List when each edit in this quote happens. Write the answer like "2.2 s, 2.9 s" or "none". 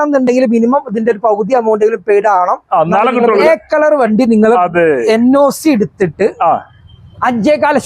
3.4 s

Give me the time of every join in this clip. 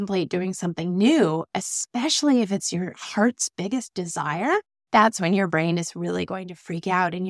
4.8 s

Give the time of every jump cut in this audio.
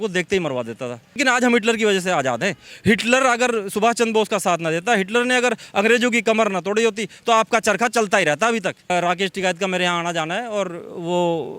1.2 s, 8.9 s

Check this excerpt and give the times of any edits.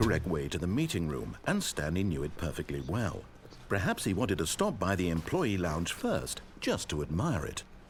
none

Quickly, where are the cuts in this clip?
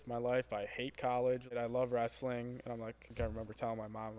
1.5 s, 3.1 s

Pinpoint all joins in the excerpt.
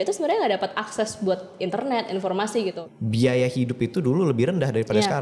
2.8 s

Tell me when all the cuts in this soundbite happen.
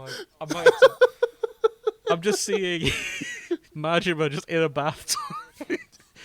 3.7 s

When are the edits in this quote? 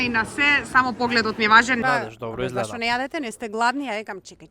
1.8 s

